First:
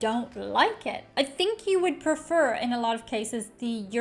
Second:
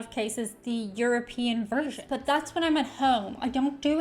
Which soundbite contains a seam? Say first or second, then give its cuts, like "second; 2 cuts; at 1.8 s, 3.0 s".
second; 1 cut; at 2.1 s